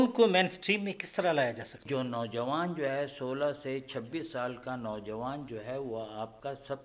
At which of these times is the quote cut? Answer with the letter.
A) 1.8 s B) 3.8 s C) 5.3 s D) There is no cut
A